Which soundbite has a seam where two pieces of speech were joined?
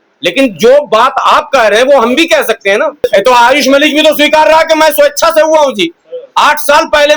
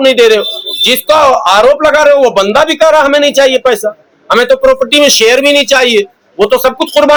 first; 1 cut; at 3.1 s

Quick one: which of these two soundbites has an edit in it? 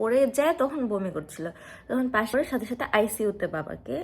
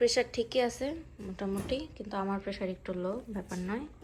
first; 1 cut; at 2.3 s

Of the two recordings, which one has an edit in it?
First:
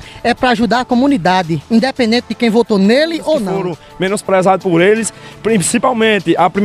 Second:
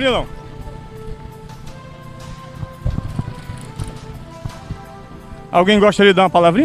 first; 1 cut; at 3.8 s

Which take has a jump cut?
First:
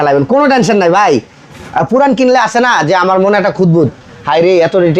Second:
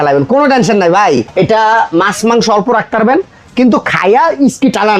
second; 1 cut; at 1.3 s

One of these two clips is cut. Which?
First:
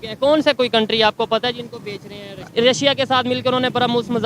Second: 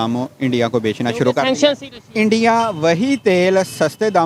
first; 1 cut; at 2.4 s

